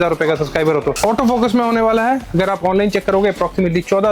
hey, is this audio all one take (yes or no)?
no